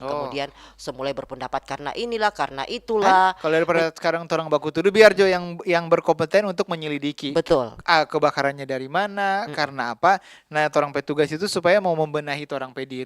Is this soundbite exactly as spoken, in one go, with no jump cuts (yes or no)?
no